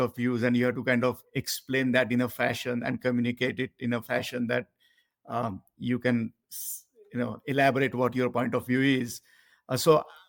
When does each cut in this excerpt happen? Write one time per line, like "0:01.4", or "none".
none

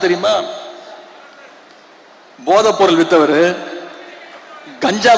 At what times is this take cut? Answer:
none

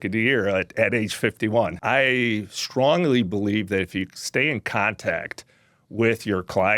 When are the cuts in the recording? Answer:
0:01.8

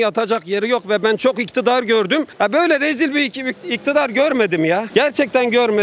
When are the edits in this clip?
0:02.3

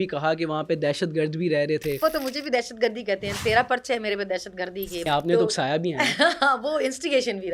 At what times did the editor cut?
0:02.0
0:05.1

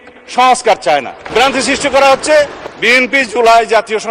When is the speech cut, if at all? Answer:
0:01.2

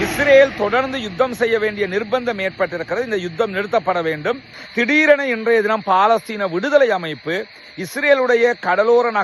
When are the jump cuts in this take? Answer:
0:04.5

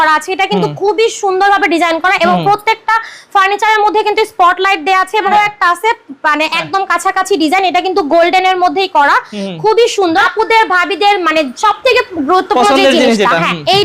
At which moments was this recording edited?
0:05.2
0:10.2

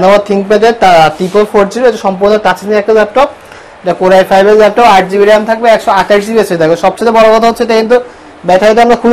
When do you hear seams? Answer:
none

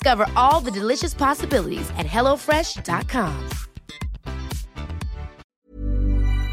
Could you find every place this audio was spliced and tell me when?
0:05.5

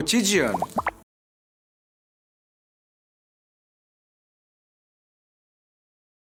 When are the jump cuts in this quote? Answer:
none

